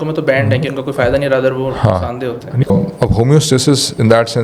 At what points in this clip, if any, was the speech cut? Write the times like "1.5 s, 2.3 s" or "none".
2.7 s